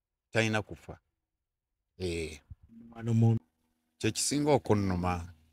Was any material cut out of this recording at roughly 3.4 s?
yes; 1 cut; at 3.4 s

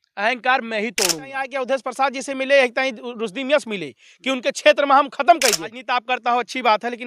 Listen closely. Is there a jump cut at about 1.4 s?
yes; 2 cuts; at 1.4 s, 5.8 s

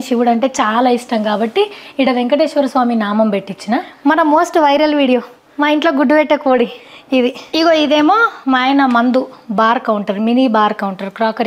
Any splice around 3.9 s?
yes; 2 cuts; at 3.9 s, 7.4 s

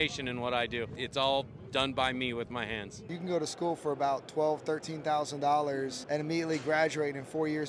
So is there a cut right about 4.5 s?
no; 3 cuts; at 1.0 s, 3.0 s, 6.0 s

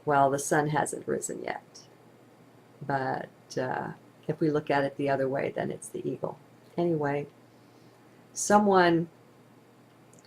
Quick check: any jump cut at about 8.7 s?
yes; 1 cut; at 8.7 s

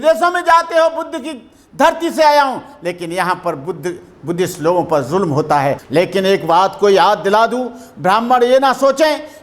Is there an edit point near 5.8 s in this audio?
yes; 1 cut; at 5.8 s

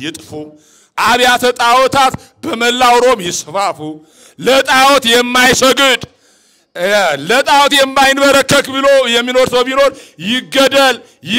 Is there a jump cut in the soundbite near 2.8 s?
no; 0 cuts

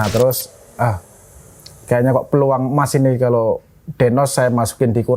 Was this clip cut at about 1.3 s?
no; 0 cuts

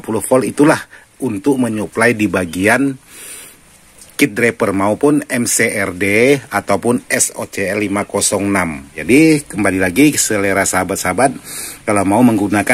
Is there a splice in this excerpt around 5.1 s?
no; 1 cut; at 9.0 s

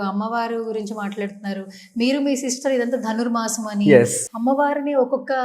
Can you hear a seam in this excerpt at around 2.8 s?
no; 1 cut; at 4.2 s

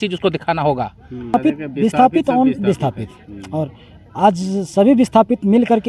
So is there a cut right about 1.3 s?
yes; 1 cut; at 1.3 s

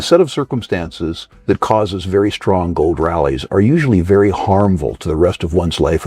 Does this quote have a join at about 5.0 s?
no; 1 cut; at 1.3 s

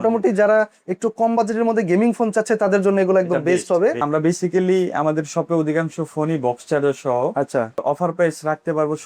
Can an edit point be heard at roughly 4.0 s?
yes; 2 cuts; at 4.0 s, 7.8 s

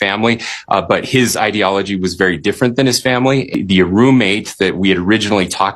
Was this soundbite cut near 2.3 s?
no; 1 cut; at 3.5 s

